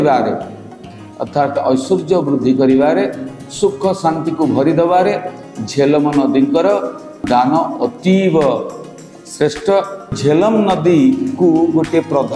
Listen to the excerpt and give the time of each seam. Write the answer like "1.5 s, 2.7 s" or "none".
7.2 s, 10.1 s